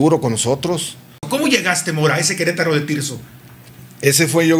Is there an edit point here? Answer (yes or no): yes